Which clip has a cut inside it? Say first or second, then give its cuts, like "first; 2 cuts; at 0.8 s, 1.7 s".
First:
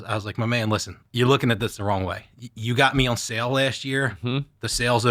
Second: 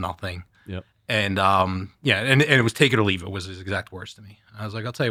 first; 1 cut; at 1.0 s